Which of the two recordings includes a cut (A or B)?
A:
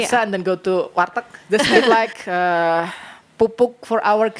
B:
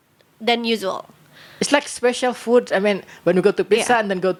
A